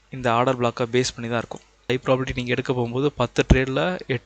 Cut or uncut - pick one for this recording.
cut